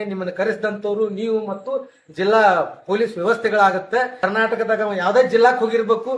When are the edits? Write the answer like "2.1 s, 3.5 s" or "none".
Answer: 4.2 s